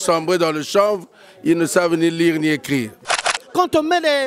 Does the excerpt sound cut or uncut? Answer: cut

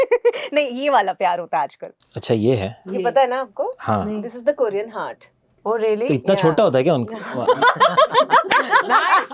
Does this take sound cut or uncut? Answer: uncut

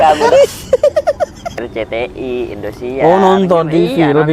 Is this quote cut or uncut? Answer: cut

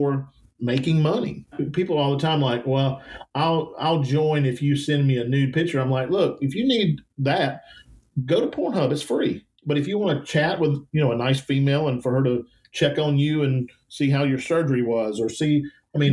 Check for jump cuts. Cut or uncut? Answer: cut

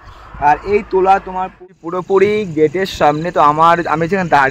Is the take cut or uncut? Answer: cut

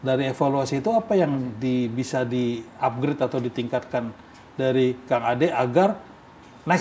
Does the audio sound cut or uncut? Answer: uncut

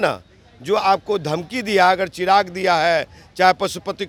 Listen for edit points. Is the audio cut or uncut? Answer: uncut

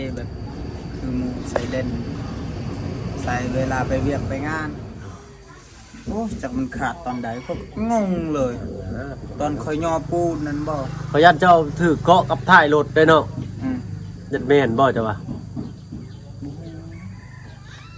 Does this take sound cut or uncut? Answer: cut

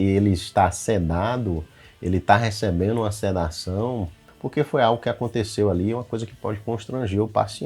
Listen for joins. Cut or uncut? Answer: cut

